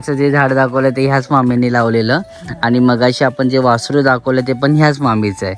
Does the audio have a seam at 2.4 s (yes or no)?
no